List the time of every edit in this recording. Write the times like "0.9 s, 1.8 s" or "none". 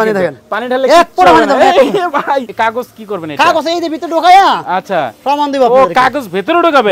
2.5 s